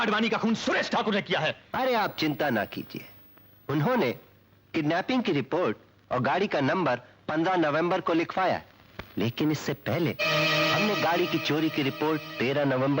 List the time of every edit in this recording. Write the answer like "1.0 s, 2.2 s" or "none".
1.6 s